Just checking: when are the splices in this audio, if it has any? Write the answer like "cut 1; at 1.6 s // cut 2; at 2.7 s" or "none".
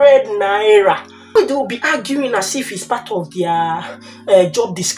cut 1; at 1.3 s